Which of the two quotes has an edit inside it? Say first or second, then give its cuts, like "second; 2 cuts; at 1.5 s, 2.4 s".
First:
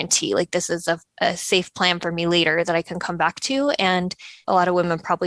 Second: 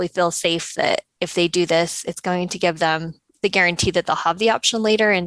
first; 1 cut; at 4.3 s